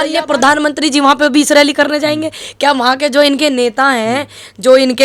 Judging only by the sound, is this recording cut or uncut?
uncut